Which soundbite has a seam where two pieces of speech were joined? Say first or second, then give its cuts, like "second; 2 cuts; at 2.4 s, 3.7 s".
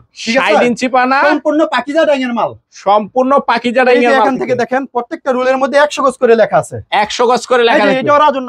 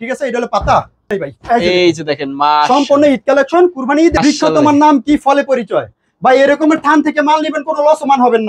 second; 2 cuts; at 1.0 s, 4.2 s